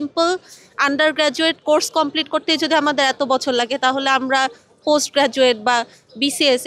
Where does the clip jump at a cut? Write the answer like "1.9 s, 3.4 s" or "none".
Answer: none

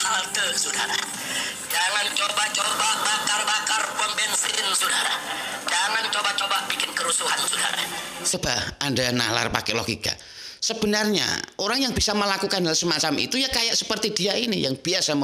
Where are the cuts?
8.3 s

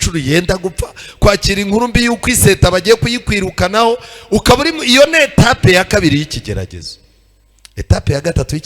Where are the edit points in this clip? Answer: none

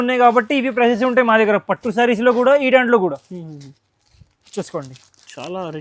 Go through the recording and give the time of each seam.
none

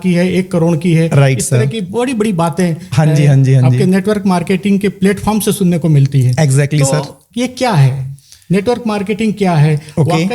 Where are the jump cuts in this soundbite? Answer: none

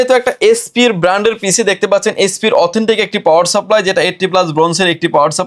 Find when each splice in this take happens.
none

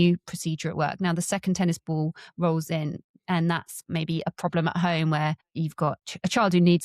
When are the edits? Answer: 5.9 s

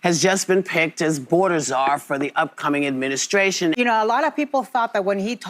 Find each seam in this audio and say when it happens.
3.8 s

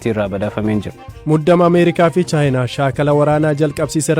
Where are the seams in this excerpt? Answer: 1.2 s

